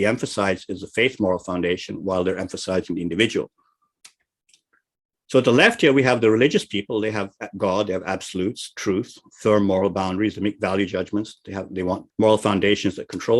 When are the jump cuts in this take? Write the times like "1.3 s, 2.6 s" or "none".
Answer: 12.1 s